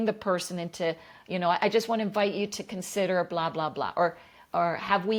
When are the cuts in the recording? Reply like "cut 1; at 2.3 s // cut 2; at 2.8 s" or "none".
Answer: none